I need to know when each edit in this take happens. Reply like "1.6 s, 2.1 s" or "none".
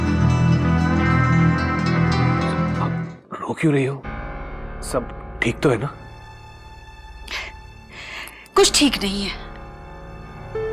2.9 s

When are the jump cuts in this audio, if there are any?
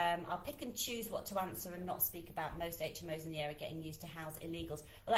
none

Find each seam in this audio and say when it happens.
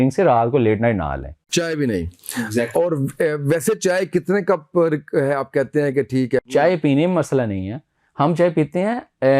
1.4 s, 6.4 s

